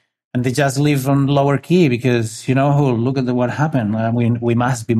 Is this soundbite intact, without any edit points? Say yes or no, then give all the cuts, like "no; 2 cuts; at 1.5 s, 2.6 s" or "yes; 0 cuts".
yes; 0 cuts